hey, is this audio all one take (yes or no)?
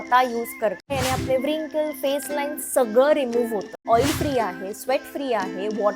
no